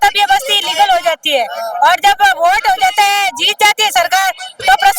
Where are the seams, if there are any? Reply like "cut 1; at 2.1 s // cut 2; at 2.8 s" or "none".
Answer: none